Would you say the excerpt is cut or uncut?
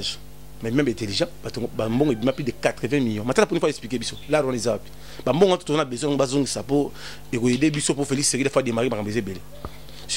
uncut